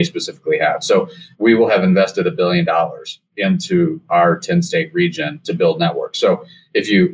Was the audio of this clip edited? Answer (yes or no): yes